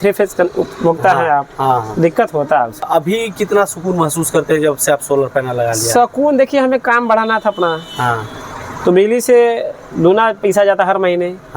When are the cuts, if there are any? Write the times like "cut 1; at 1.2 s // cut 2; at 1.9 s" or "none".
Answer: cut 1; at 2.8 s